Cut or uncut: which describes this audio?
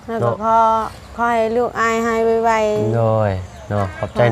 uncut